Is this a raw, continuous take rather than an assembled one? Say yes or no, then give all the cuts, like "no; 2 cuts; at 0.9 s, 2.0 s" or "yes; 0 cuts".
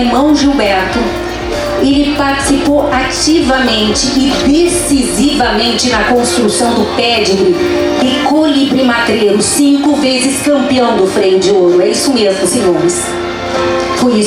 yes; 0 cuts